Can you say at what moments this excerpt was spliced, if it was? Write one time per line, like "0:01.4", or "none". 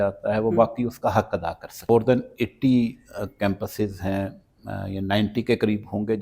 0:01.9